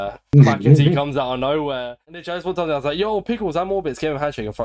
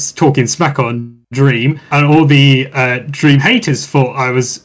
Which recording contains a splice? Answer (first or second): first